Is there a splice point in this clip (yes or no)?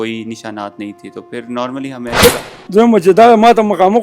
yes